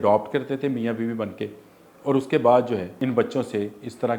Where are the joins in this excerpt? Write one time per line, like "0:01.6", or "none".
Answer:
0:02.9

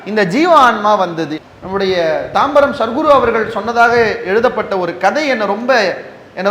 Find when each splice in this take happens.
0:01.4

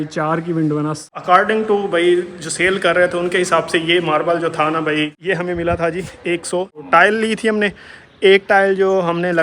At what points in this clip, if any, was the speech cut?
0:01.0
0:05.1
0:06.8

